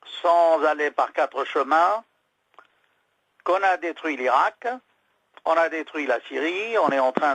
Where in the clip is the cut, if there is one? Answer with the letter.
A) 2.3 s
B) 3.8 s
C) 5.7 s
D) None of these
B